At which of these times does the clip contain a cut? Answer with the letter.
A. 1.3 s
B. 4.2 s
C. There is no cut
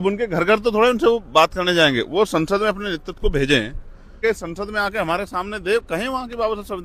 B